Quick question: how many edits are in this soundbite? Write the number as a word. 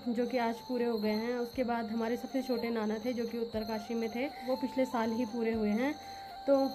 zero